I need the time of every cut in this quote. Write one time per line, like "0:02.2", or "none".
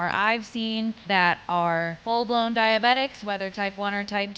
0:01.0
0:02.0

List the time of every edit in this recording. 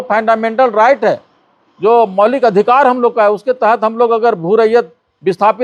none

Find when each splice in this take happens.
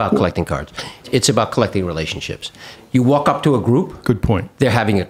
0:01.0
0:02.8

